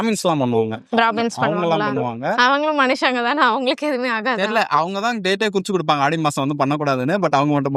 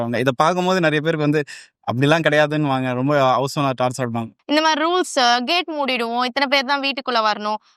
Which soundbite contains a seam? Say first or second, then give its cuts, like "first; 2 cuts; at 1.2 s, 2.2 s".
second; 1 cut; at 4.3 s